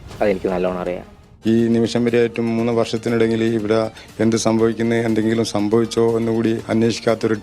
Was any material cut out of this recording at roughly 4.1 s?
no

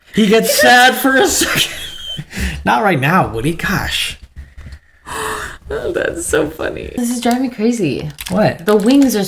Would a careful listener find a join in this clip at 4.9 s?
no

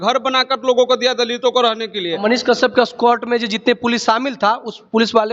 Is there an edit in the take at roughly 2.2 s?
yes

